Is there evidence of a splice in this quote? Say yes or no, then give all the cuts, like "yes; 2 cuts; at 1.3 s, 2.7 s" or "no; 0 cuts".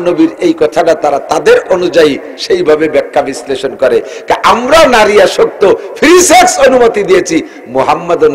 no; 0 cuts